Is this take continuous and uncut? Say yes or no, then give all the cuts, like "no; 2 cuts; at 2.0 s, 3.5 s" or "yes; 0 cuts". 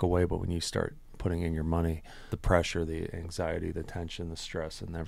no; 1 cut; at 2.3 s